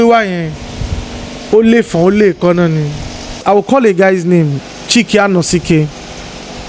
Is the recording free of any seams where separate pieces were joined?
no; 1 cut; at 3.4 s

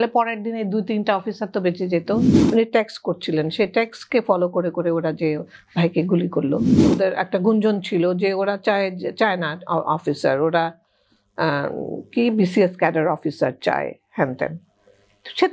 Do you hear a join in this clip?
yes; 2 cuts; at 2.4 s, 6.8 s

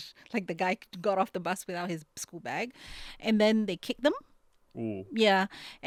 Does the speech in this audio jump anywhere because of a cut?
no; 0 cuts

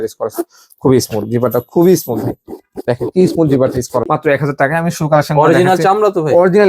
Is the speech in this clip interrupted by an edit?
yes; 1 cut; at 4.1 s

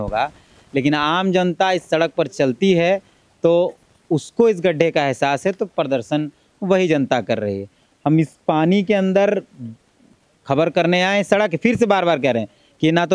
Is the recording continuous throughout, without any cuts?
yes; 0 cuts

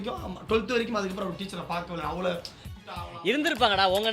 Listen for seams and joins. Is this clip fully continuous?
no; 1 cut; at 3.0 s

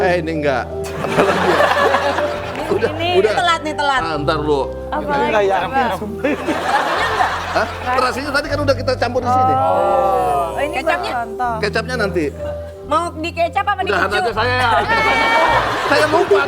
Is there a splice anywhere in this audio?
no; 0 cuts

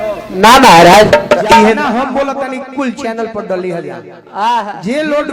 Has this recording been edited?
yes; 1 cut; at 1.8 s

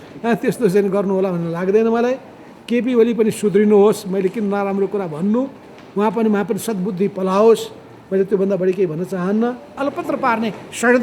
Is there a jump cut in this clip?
yes; 1 cut; at 9.8 s

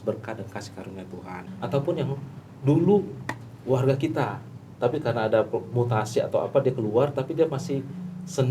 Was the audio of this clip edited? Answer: yes; 1 cut; at 1.5 s

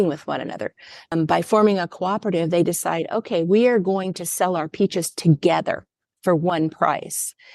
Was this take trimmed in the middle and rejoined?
yes; 1 cut; at 1.1 s

